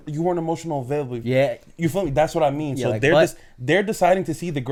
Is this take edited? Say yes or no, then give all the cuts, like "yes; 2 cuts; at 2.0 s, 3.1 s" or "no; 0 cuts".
no; 0 cuts